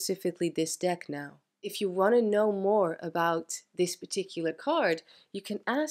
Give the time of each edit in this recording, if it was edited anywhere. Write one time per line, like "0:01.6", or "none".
0:01.7